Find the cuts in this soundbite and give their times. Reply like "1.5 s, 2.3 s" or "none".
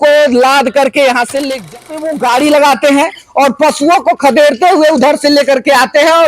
1.8 s